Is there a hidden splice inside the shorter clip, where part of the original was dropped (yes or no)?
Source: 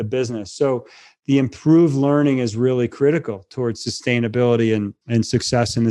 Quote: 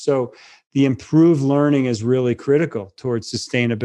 no